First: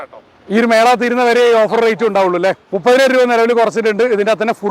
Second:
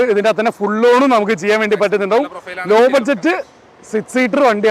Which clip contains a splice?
first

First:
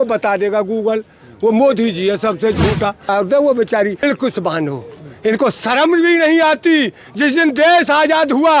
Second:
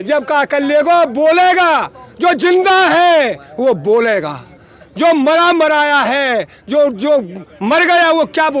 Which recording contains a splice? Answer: first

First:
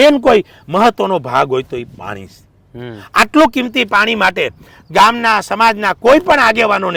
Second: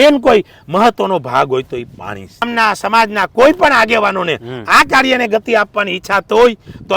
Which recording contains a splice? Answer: second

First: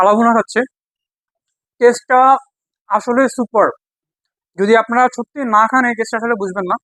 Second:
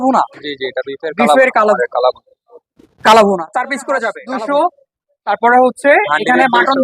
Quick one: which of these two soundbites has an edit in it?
second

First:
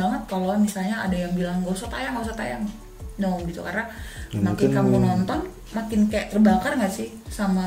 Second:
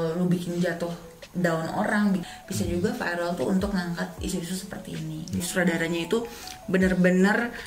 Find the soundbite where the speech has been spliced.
second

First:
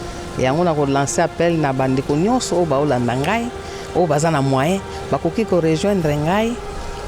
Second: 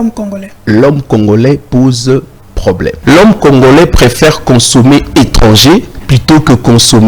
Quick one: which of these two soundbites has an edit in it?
second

